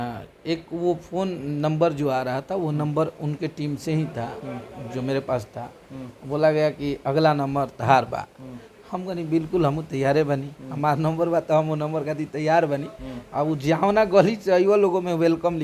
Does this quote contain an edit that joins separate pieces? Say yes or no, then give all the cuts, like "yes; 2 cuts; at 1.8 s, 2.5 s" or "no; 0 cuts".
no; 0 cuts